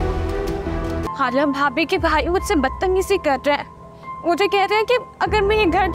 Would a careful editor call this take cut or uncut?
cut